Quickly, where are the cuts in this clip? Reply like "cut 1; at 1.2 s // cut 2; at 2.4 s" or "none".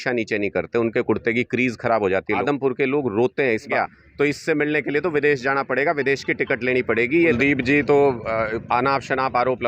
cut 1; at 2.4 s // cut 2; at 3.7 s // cut 3; at 7.4 s